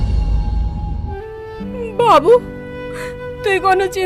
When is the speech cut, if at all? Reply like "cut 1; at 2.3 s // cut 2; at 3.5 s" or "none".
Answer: cut 1; at 1.4 s